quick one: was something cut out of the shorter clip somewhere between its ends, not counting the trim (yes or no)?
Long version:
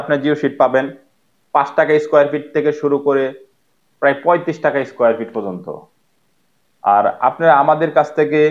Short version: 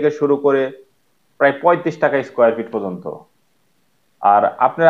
no